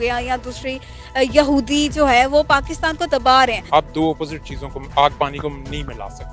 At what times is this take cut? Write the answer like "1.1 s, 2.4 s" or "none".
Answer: 3.6 s